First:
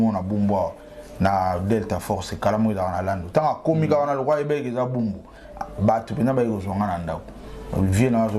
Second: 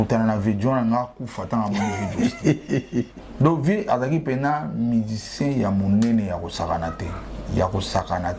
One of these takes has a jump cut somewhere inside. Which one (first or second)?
second